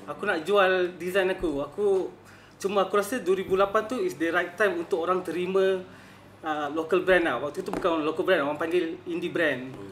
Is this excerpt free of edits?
yes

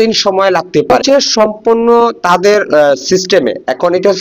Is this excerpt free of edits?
no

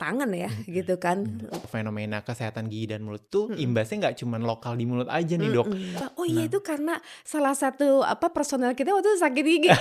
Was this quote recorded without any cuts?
no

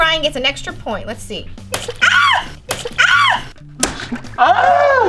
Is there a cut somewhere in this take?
yes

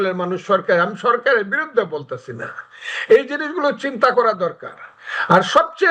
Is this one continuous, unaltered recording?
yes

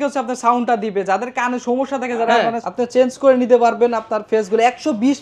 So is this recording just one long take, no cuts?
no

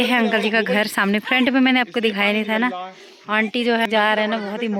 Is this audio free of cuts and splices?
yes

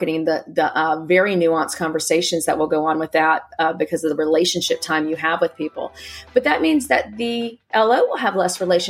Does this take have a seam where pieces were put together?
no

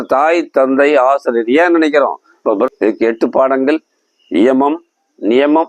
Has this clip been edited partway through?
yes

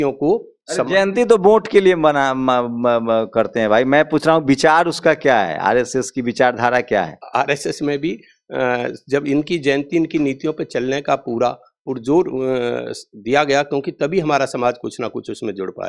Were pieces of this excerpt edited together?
yes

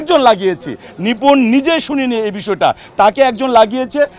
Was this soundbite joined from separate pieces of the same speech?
no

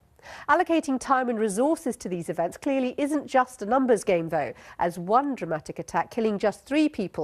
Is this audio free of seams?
no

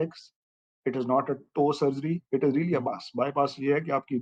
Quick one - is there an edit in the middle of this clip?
no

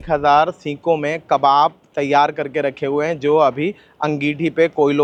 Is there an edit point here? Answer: no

